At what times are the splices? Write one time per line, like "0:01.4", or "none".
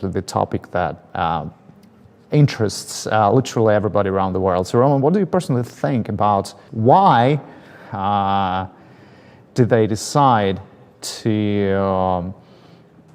0:06.6